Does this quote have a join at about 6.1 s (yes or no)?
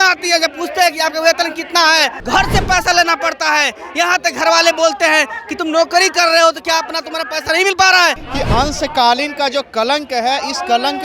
no